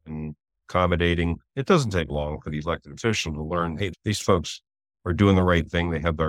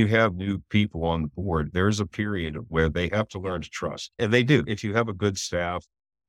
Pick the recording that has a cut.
second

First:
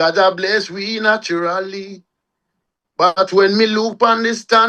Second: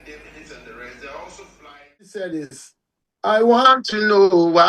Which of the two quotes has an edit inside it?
second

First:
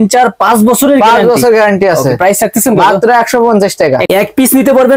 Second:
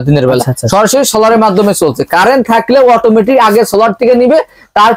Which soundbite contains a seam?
first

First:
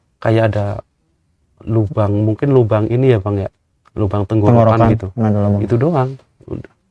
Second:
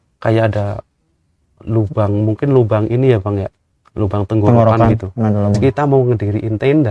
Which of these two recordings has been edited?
second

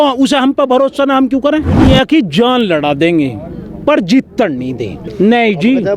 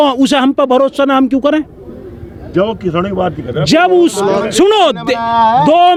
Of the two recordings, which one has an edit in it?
first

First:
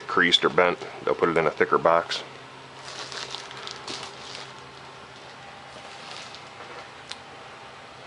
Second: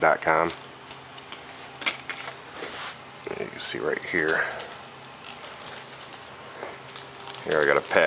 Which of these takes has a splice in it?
second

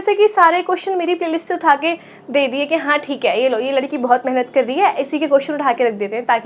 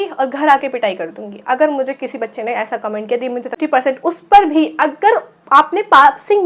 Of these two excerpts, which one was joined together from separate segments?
second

